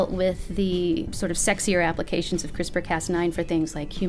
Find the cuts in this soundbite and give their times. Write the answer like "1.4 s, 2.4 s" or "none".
1.1 s